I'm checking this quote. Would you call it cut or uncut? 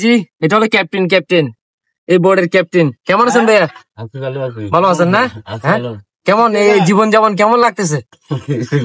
uncut